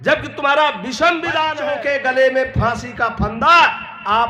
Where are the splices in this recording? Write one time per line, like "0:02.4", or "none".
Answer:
0:01.6

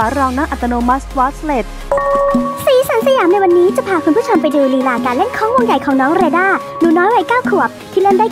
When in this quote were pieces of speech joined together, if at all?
0:01.8

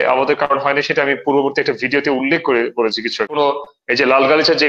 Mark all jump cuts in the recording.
0:03.3

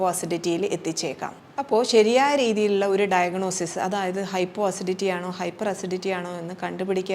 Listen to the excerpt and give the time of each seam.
none

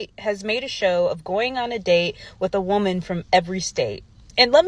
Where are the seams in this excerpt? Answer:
none

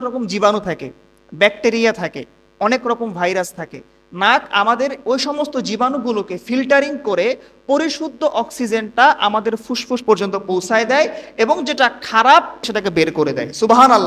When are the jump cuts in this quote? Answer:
0:12.5

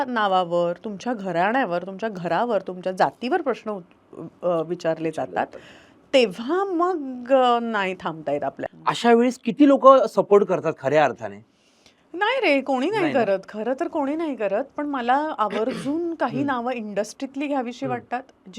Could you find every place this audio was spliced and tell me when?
0:08.7

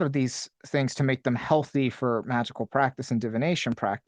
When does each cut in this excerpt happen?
none

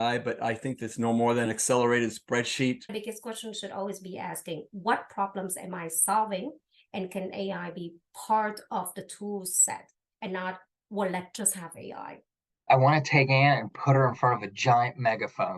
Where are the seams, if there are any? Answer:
0:01.5
0:02.9
0:12.7

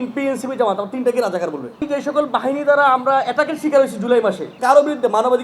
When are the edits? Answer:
0:01.8
0:04.5

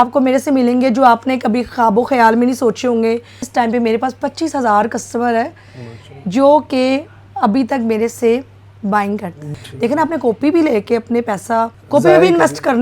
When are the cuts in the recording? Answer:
0:03.4
0:09.4
0:11.8

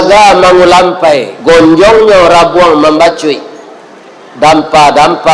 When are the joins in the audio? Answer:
0:01.3

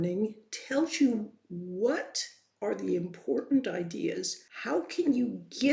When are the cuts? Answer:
none

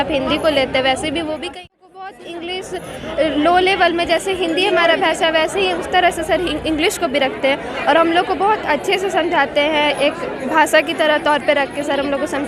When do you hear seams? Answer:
0:01.5

